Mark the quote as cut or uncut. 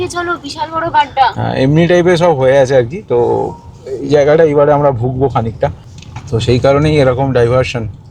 cut